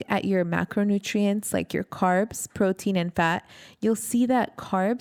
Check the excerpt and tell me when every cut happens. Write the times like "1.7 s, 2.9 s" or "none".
none